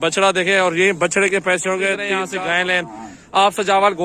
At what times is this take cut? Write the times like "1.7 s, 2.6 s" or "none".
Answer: 2.2 s

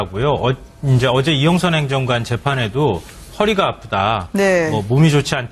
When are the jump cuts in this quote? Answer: none

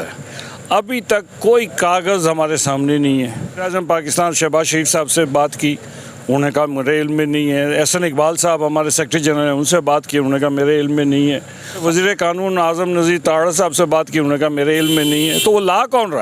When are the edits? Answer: 3.7 s, 11.8 s

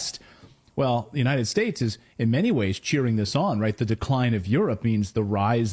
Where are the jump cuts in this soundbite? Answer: none

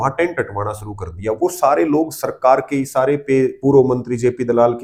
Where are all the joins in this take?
none

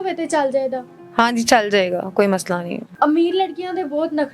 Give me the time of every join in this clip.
none

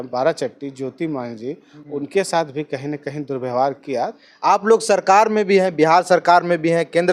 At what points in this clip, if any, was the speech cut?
1.7 s, 4.2 s

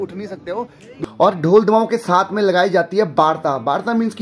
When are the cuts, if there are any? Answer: 1.0 s

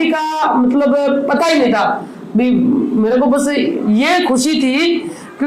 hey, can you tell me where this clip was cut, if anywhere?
none

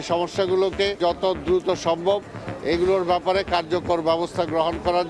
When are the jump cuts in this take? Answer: 1.0 s

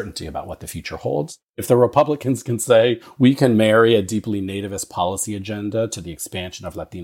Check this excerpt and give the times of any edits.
1.5 s, 3.1 s

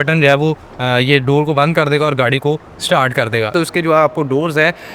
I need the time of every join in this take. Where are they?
3.5 s

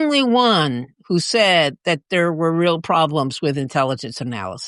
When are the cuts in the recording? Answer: none

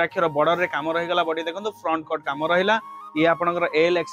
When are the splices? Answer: none

